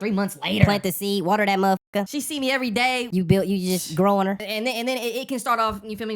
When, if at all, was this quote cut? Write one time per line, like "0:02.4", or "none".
0:02.1
0:03.1
0:04.5